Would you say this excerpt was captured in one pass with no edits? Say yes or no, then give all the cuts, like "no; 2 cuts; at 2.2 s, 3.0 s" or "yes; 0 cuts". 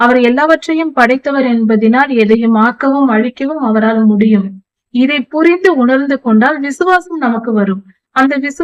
yes; 0 cuts